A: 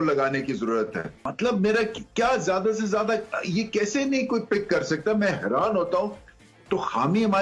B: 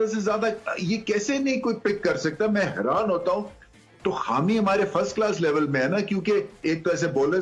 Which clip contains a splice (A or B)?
A